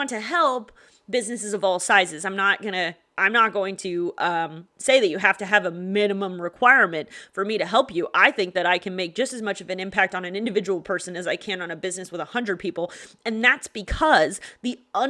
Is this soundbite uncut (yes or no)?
yes